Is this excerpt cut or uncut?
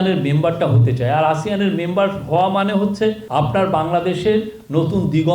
cut